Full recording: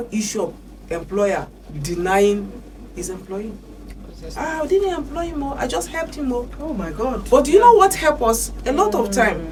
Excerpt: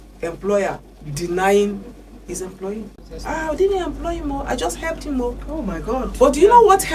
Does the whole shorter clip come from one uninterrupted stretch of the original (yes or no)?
no